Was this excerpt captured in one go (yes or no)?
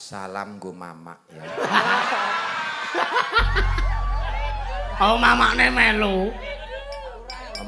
yes